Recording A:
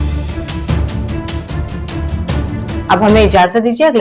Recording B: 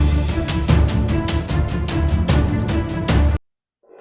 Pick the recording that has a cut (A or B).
B